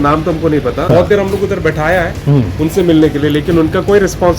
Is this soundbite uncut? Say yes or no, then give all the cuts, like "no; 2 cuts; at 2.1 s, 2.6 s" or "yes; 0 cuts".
no; 1 cut; at 1.0 s